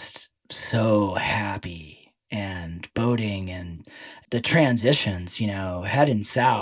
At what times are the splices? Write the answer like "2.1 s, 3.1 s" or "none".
4.3 s